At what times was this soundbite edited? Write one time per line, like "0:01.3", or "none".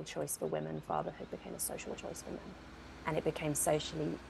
none